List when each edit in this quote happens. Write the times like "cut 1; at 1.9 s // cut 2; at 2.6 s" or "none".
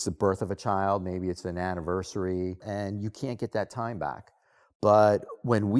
cut 1; at 2.6 s